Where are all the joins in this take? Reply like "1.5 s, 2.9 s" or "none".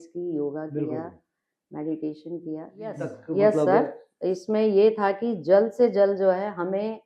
3.1 s